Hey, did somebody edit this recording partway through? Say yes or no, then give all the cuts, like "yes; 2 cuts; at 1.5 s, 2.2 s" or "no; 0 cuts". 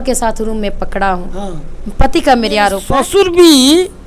yes; 1 cut; at 2.9 s